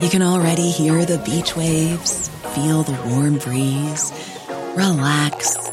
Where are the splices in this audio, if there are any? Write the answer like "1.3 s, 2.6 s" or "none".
none